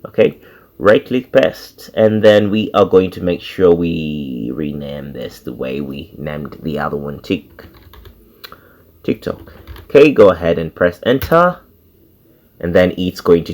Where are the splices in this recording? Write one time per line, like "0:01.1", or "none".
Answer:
none